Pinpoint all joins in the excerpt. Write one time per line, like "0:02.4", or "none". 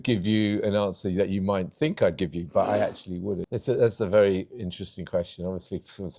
0:03.4